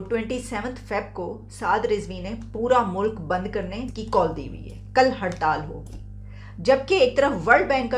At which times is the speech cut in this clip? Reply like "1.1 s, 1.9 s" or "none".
3.9 s